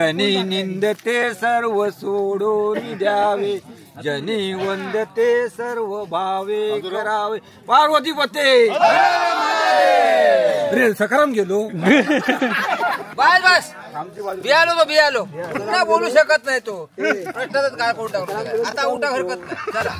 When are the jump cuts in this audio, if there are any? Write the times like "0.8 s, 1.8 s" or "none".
13.0 s